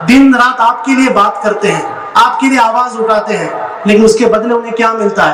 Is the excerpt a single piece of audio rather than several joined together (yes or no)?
yes